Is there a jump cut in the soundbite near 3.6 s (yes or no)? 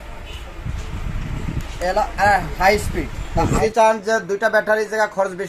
yes